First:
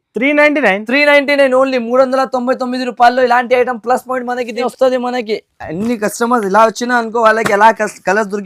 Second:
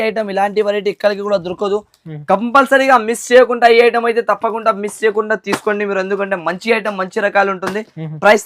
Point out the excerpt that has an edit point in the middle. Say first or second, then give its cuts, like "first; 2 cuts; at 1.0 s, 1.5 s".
first; 1 cut; at 4.7 s